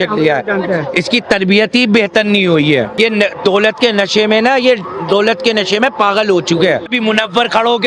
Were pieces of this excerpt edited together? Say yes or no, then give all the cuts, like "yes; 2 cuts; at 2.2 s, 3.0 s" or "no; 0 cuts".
yes; 2 cuts; at 2.9 s, 6.9 s